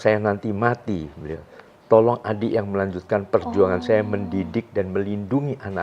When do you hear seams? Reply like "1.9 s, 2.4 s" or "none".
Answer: none